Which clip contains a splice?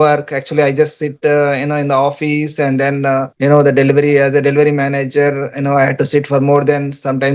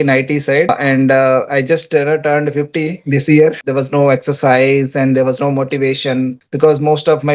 second; 3 cuts; at 0.7 s, 3.6 s, 6.4 s

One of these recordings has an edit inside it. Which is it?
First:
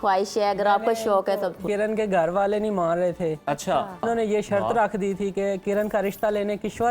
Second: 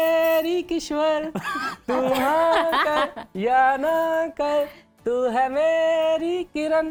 first; 3 cuts; at 1.6 s, 4.0 s, 5.6 s

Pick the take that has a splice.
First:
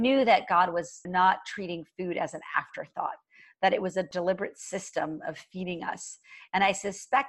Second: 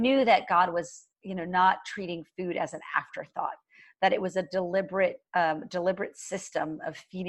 first; 2 cuts; at 1.0 s, 4.1 s

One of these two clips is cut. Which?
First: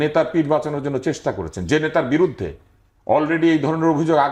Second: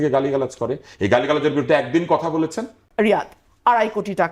second; 1 cut; at 2.8 s

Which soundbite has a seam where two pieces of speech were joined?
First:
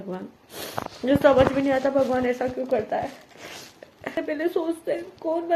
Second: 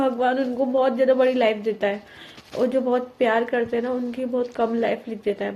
first; 1 cut; at 4.2 s

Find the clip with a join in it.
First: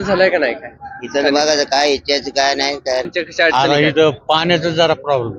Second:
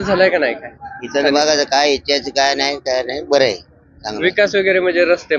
first; 1 cut; at 3.1 s

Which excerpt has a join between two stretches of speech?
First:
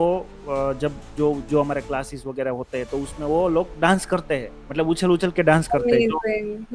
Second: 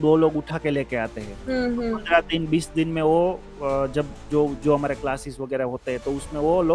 first; 1 cut; at 4.6 s

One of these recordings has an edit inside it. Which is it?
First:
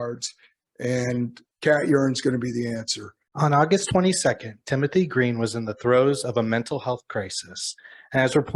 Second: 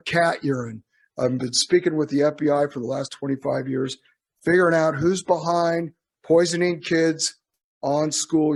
first; 1 cut; at 3.2 s

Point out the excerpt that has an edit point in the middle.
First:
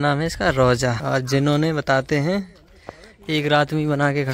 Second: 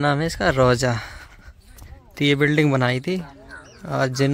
first; 1 cut; at 1.0 s

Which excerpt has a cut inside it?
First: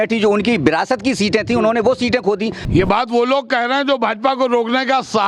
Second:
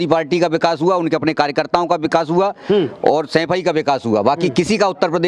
first; 1 cut; at 2.6 s

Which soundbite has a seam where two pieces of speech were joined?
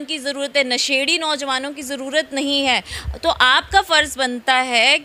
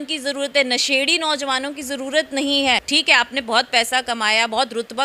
second; 1 cut; at 2.8 s

